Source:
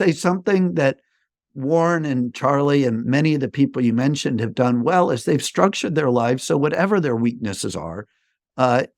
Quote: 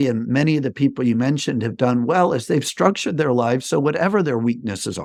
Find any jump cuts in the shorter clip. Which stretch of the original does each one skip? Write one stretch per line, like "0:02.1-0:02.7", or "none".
none